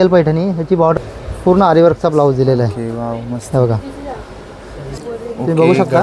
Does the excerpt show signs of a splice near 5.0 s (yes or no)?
yes